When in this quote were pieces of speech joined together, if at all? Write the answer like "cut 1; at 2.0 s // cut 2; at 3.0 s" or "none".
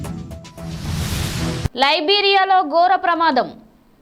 cut 1; at 1.6 s